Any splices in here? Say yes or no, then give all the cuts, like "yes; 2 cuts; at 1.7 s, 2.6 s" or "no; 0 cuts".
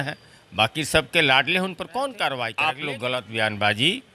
yes; 1 cut; at 2.7 s